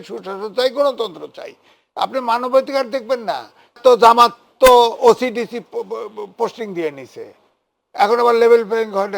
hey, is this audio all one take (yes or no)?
no